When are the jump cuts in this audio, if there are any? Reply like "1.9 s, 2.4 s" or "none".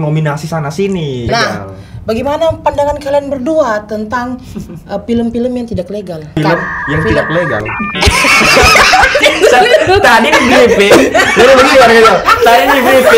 1.2 s, 6.4 s, 9.2 s